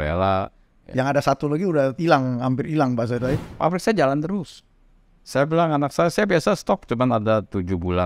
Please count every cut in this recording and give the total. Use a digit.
1